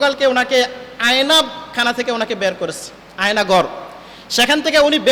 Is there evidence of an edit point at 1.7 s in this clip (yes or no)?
no